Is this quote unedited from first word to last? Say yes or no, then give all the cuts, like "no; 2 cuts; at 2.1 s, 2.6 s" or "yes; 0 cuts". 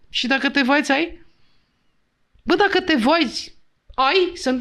yes; 0 cuts